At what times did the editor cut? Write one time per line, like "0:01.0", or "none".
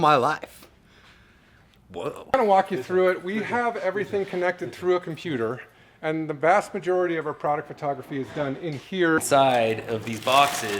0:02.2
0:09.2